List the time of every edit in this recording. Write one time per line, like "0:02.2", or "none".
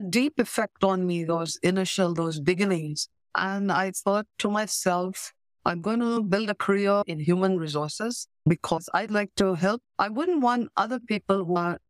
0:09.8